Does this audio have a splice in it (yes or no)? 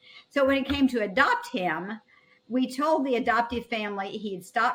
no